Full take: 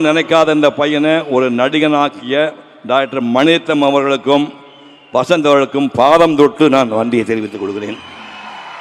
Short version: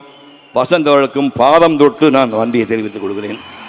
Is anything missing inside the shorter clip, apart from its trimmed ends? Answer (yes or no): no